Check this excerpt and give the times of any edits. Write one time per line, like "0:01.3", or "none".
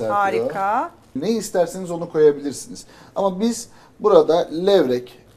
0:01.2